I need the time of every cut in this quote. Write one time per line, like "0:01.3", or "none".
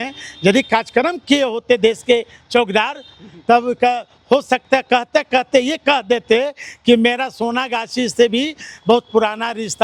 none